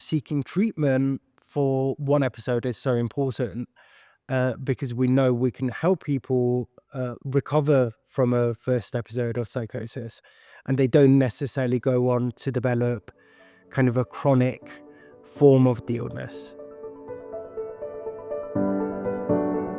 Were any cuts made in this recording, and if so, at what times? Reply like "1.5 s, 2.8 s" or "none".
16.3 s